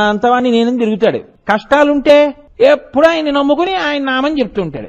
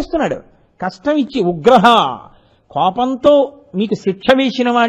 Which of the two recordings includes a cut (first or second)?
first